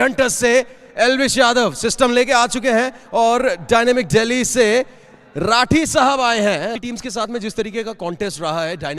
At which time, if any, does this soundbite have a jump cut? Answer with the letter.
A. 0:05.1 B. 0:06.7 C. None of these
B